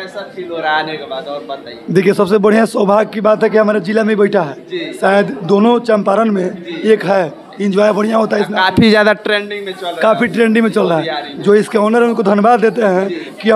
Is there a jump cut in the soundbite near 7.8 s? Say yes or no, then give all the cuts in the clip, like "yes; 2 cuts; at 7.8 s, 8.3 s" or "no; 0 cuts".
no; 0 cuts